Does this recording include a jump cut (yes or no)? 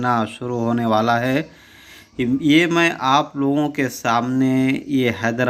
no